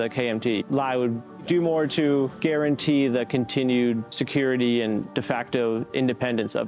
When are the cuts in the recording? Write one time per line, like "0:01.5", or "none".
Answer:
none